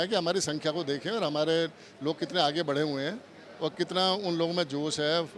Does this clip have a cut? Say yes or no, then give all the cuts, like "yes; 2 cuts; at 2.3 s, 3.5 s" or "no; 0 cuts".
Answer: no; 0 cuts